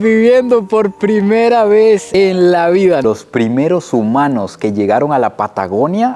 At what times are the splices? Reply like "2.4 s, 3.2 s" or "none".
3.0 s